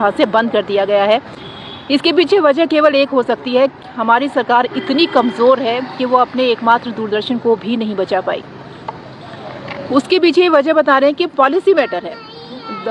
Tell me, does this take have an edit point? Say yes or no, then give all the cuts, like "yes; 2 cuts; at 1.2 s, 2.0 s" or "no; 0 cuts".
no; 0 cuts